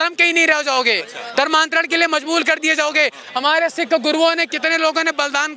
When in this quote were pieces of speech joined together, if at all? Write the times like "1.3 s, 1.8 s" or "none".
none